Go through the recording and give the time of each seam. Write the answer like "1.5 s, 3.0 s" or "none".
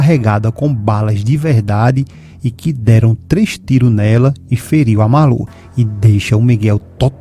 none